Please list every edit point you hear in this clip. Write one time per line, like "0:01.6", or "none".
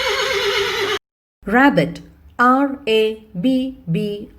0:01.0